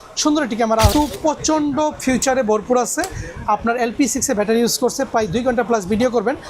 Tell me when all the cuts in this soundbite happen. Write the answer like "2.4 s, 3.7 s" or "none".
0.9 s